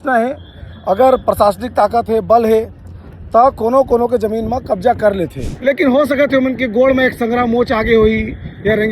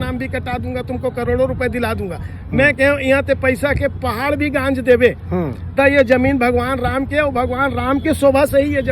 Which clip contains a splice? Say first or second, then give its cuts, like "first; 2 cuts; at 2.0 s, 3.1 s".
first; 1 cut; at 5.4 s